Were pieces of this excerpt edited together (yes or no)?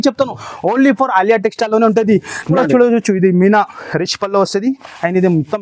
yes